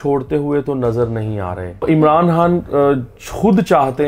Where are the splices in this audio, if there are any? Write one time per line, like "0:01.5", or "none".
0:01.8

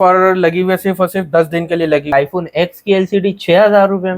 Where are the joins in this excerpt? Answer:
0:02.1

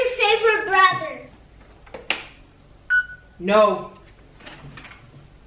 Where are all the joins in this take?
0:01.3

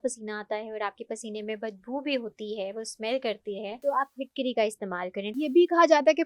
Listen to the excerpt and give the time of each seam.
0:03.8
0:05.4

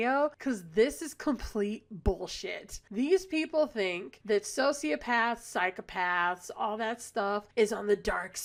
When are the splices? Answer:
none

